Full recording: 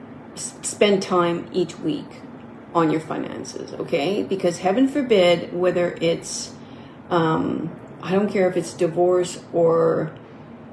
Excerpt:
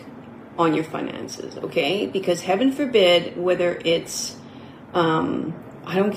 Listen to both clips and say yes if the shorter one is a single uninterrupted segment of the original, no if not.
yes